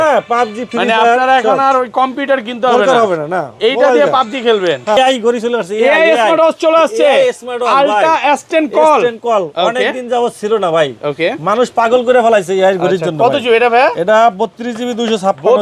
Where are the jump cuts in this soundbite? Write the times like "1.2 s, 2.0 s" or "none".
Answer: 5.0 s